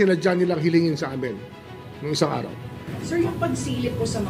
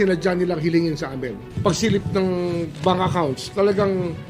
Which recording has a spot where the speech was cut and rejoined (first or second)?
second